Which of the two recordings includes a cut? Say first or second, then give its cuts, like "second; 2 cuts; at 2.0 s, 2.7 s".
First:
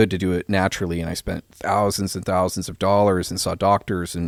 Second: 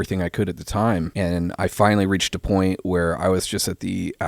second; 1 cut; at 1.1 s